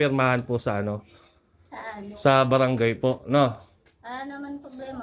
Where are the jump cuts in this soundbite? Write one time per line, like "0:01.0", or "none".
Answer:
none